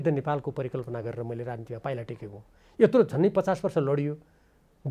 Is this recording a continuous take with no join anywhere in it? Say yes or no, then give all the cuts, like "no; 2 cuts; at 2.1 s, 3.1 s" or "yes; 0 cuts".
yes; 0 cuts